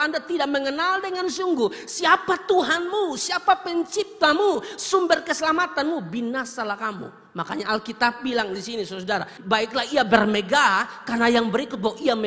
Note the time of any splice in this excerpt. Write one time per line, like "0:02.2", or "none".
none